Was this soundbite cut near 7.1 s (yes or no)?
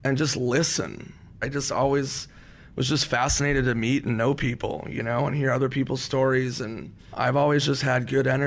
yes